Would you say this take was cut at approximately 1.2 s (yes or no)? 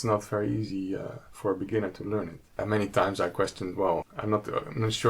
no